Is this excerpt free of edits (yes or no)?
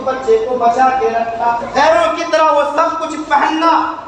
no